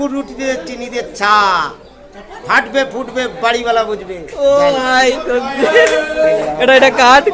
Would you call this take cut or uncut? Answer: uncut